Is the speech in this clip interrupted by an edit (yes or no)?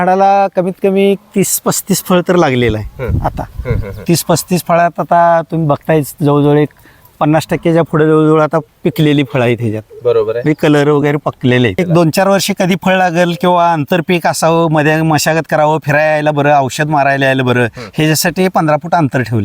yes